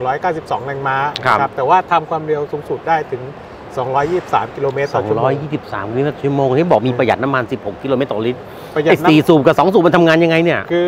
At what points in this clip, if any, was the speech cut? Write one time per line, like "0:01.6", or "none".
none